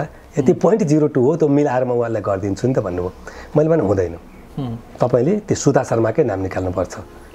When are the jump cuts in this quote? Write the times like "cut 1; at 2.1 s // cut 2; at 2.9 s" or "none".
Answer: none